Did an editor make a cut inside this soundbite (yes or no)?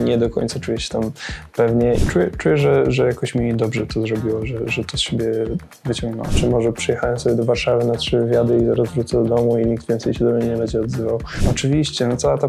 yes